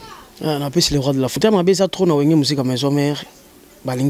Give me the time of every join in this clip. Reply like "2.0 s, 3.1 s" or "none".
1.4 s